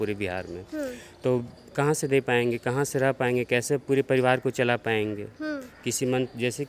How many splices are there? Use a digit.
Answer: 0